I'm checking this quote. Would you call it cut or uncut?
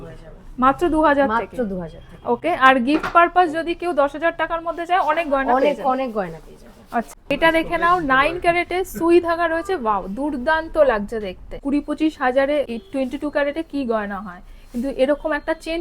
cut